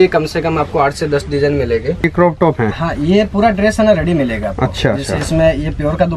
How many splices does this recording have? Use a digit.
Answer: 1